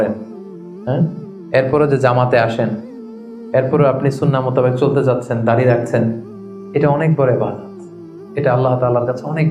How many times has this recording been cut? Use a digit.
0